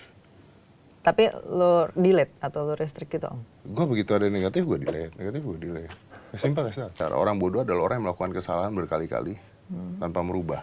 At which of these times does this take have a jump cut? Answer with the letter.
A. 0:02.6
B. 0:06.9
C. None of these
B